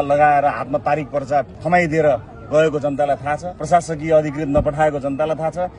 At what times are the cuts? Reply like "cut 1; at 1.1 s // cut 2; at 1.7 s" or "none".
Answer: cut 1; at 1.6 s // cut 2; at 3.5 s